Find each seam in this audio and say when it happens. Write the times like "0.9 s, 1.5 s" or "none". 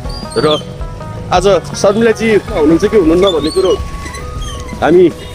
2.5 s